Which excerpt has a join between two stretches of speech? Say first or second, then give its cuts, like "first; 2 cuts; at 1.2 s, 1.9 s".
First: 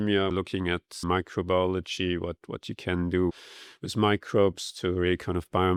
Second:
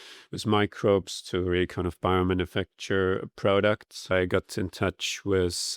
second; 1 cut; at 4.1 s